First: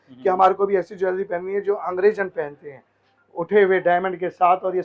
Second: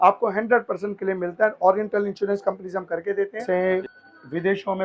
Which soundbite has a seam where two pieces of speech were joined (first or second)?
second